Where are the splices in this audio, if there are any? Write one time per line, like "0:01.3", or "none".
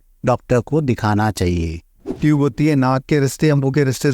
0:02.2